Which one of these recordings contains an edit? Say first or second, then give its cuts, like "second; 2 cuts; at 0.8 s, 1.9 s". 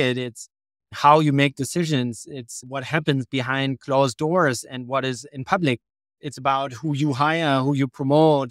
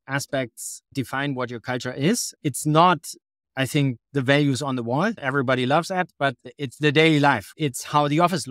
second; 2 cuts; at 0.9 s, 2.3 s